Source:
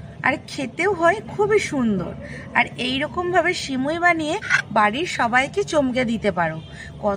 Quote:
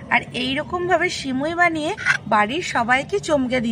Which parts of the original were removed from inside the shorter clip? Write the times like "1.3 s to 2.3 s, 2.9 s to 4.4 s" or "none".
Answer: none